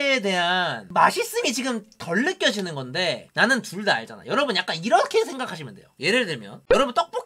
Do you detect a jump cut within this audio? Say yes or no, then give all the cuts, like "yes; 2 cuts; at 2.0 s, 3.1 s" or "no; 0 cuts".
no; 0 cuts